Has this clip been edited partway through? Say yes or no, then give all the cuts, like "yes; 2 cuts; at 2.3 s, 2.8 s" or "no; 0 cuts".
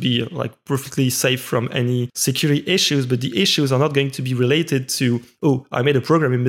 yes; 1 cut; at 2.1 s